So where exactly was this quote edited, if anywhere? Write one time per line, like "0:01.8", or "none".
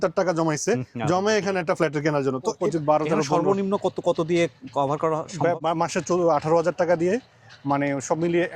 0:02.6
0:05.6